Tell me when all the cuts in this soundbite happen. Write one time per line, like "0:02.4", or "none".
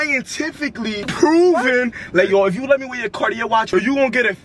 0:01.1
0:03.7

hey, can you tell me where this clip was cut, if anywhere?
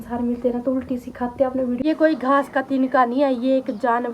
0:01.8

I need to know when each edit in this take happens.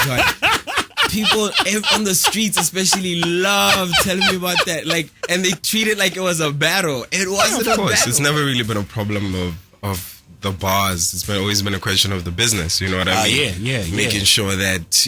0:07.8

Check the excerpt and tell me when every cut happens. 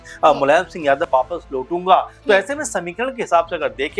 0:01.1

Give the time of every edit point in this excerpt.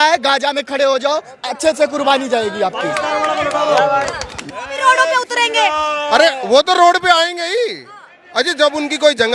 0:04.4

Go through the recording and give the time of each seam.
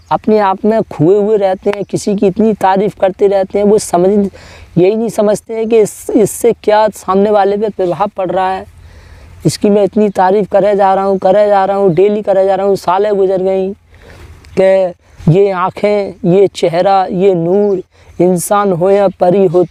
none

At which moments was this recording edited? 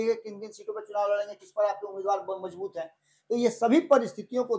none

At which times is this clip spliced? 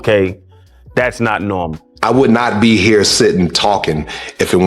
0:01.8

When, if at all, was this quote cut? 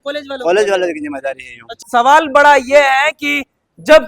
0:01.8

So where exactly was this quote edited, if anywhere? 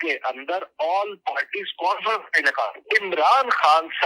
0:02.8

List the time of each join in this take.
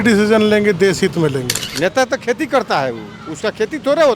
0:01.6

